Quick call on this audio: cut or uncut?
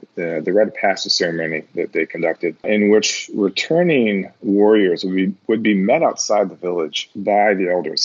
cut